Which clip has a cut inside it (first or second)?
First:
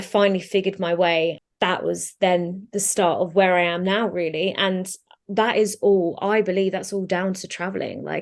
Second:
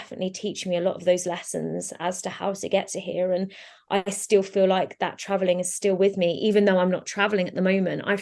first